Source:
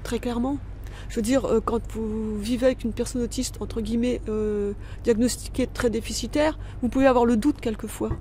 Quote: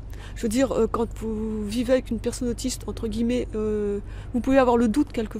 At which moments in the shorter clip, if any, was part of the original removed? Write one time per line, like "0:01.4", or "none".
0:04.2